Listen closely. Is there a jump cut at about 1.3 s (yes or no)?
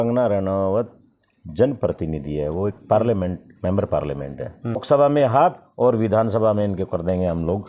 no